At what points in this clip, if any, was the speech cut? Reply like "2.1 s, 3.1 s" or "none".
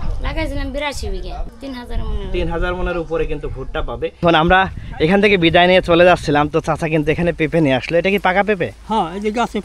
1.5 s, 4.1 s